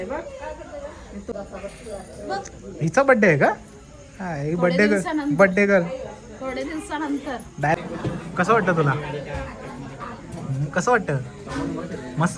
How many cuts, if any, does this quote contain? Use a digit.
2